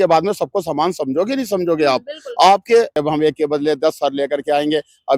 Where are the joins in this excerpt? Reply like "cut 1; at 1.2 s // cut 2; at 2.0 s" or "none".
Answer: cut 1; at 3.0 s